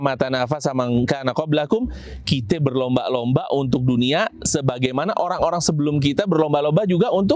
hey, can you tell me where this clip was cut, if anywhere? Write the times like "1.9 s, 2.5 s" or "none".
none